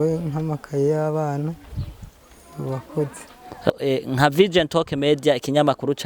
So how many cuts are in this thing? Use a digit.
1